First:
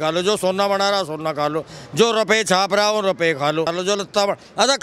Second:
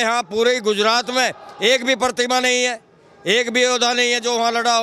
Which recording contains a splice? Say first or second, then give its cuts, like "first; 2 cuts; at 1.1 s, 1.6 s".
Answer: first; 1 cut; at 3.8 s